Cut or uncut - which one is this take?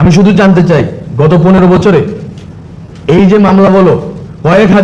uncut